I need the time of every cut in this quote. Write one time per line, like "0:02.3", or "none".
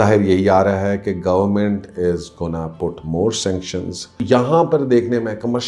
0:04.2